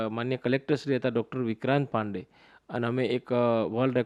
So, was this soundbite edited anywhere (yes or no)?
no